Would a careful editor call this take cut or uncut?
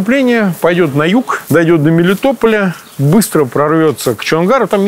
cut